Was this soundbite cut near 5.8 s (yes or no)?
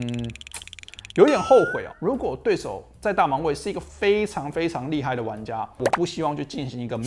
yes